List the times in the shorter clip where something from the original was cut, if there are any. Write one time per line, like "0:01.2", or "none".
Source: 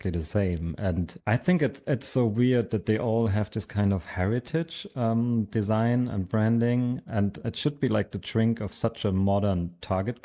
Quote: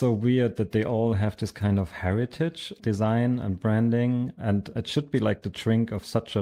0:02.8